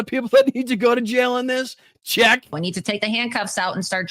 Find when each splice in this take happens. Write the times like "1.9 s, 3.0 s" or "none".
2.6 s